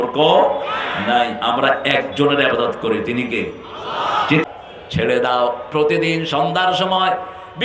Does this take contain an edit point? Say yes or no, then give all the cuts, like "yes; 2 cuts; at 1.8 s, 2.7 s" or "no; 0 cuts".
yes; 1 cut; at 4.5 s